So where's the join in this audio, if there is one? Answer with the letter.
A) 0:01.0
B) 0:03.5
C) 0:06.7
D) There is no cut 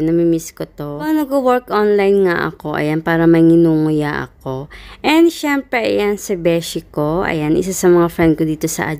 A